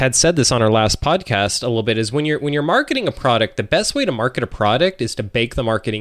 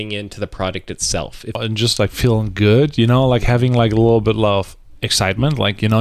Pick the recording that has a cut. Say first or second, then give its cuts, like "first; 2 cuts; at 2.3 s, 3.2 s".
second; 1 cut; at 1.6 s